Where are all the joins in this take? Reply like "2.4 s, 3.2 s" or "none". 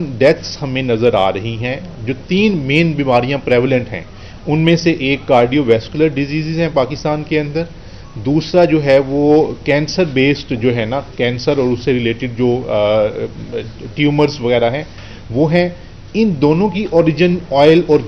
none